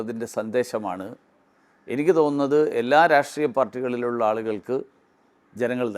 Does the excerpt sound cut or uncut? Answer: uncut